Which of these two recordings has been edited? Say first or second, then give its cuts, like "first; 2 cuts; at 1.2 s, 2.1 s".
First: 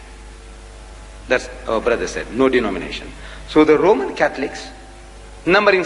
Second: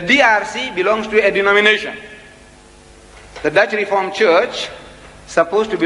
first; 1 cut; at 1.3 s